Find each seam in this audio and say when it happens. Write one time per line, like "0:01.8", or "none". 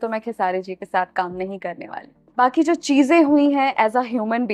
0:02.2